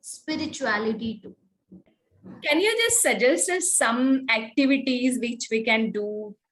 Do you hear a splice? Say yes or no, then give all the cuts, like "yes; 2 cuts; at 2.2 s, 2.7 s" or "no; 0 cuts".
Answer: no; 0 cuts